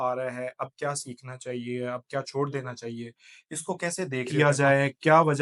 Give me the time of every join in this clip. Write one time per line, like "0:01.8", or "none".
0:04.3